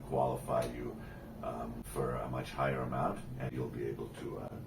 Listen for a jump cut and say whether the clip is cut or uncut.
cut